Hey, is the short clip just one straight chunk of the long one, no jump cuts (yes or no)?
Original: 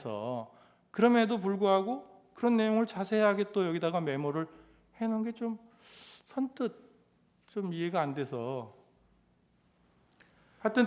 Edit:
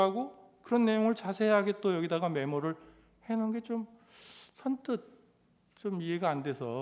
yes